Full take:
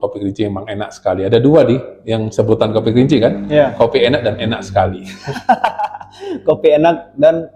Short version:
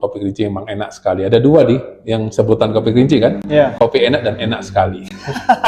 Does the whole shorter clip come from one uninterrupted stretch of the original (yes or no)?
yes